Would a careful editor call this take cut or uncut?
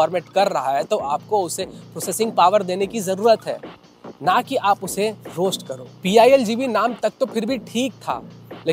uncut